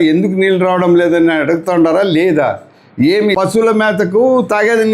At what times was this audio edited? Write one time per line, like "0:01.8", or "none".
0:03.5